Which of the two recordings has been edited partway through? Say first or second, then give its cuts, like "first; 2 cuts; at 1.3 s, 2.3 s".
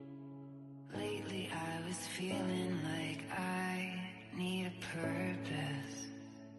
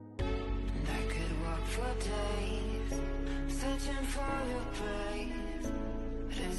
first; 1 cut; at 1.0 s